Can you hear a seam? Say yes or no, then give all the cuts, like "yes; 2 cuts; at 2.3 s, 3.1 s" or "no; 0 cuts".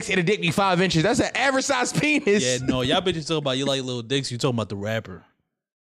no; 0 cuts